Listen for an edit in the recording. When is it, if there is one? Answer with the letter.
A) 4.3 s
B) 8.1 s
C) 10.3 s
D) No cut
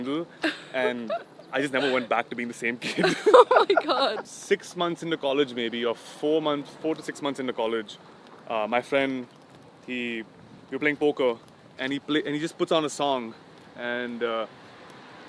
A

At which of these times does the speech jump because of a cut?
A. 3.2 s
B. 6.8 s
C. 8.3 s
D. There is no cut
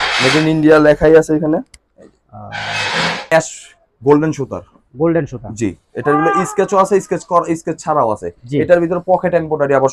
A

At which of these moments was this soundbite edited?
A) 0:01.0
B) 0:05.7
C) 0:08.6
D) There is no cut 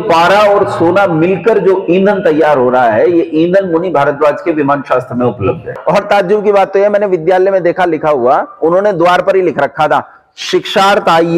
B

